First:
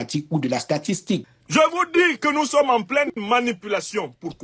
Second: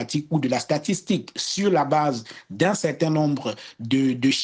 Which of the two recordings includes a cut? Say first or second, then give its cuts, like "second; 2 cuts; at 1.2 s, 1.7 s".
first; 2 cuts; at 1.4 s, 3.2 s